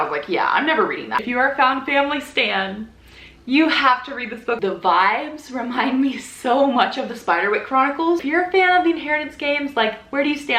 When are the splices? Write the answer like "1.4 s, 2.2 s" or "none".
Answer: 1.2 s, 4.6 s, 8.2 s